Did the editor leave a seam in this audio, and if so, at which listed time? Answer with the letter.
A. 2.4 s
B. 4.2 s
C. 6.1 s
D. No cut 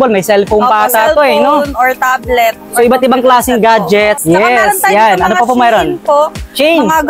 B